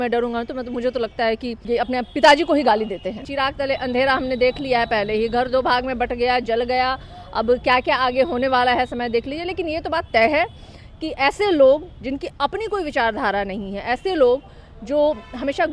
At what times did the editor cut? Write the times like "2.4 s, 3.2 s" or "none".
1.6 s, 3.3 s